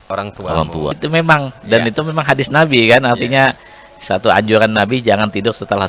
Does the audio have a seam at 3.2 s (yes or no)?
no